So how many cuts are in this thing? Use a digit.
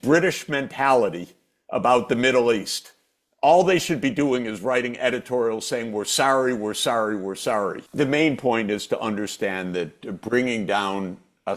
1